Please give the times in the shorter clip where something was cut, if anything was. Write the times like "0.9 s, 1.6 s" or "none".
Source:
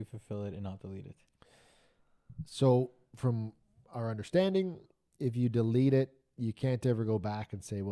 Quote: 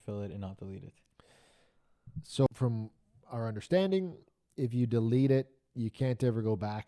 2.5 s